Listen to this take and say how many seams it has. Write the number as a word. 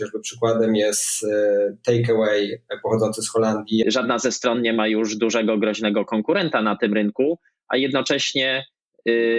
one